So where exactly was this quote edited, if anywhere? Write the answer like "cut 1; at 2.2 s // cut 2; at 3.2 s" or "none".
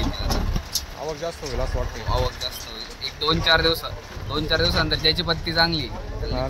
none